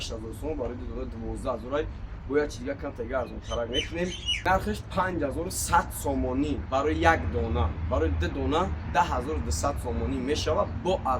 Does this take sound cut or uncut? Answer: cut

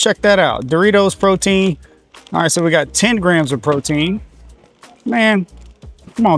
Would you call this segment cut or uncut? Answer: uncut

